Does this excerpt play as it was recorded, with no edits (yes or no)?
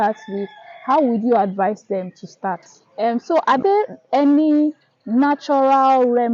no